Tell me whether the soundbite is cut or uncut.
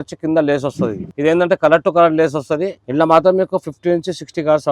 cut